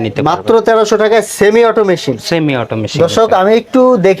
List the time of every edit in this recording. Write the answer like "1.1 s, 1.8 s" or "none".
none